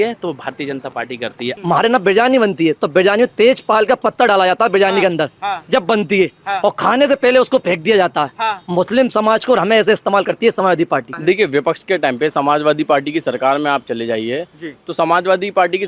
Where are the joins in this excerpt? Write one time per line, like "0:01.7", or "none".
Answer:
0:01.5
0:11.1